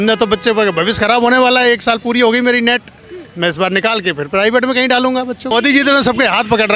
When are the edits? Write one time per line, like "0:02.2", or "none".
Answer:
0:05.4